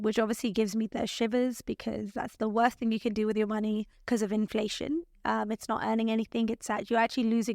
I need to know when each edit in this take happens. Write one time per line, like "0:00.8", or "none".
0:03.9